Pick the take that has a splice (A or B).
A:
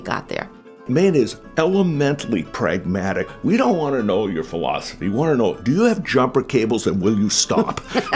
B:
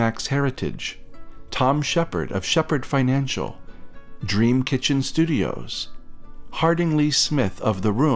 A